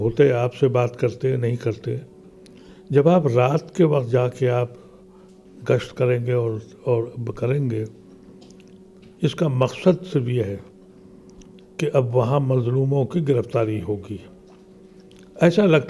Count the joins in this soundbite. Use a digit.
0